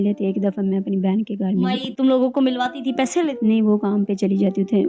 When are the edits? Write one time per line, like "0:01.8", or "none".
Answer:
0:01.9
0:03.4

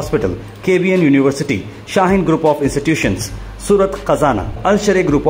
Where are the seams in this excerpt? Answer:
none

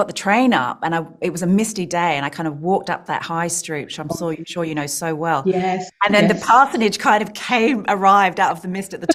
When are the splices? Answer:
none

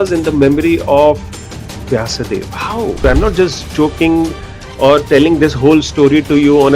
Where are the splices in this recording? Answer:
0:03.0

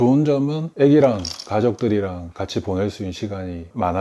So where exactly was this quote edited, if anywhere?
none

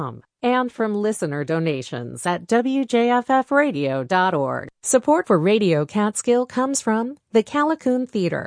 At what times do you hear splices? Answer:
0:04.7

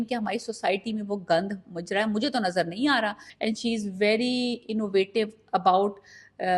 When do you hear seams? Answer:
0:03.3

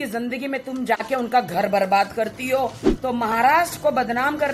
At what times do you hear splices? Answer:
0:02.9

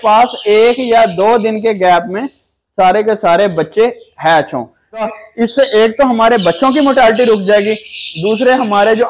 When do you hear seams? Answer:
0:05.1

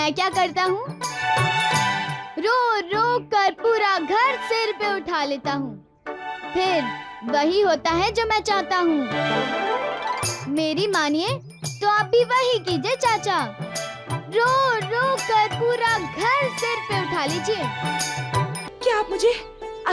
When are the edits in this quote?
0:18.6

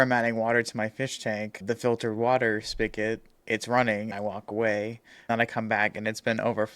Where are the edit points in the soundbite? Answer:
0:03.3
0:04.1
0:05.3

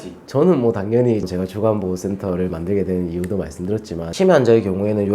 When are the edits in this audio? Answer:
0:01.3
0:04.0

